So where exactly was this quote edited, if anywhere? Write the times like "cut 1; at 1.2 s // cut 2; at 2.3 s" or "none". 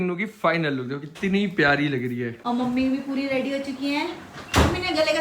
cut 1; at 2.3 s